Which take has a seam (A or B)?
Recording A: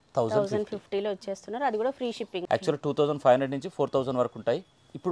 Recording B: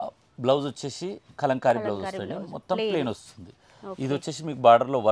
A